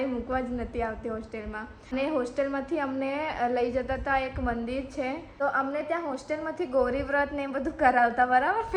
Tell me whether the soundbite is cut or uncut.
cut